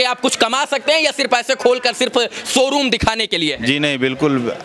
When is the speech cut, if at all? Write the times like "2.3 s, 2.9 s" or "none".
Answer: none